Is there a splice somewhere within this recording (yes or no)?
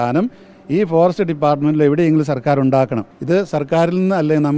yes